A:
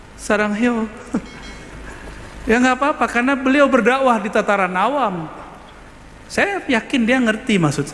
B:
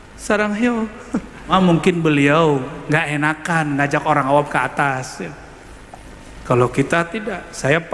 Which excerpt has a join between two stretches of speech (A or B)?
B